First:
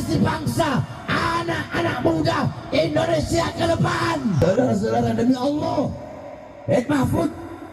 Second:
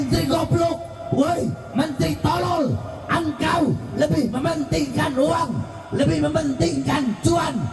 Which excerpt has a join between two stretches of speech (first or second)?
first